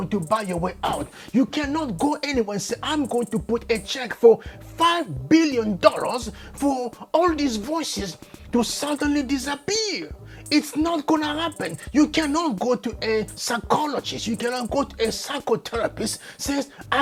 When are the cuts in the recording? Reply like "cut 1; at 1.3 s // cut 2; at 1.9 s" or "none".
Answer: none